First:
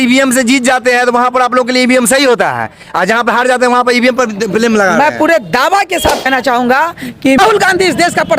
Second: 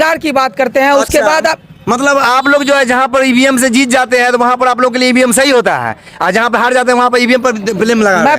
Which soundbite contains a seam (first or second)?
first